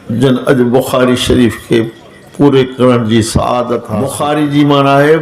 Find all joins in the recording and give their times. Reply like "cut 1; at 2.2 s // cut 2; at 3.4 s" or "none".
cut 1; at 4.1 s

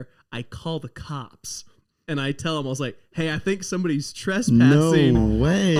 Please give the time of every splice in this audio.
none

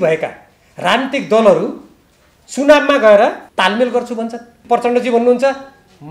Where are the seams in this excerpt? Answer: cut 1; at 3.4 s // cut 2; at 4.5 s

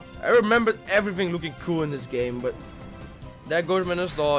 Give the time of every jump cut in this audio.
none

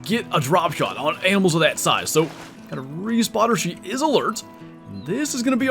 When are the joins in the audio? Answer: cut 1; at 2.5 s

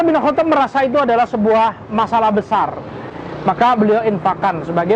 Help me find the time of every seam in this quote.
cut 1; at 3.1 s

